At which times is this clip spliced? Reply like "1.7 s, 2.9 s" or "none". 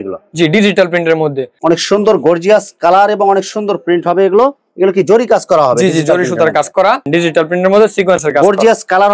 1.5 s, 7.1 s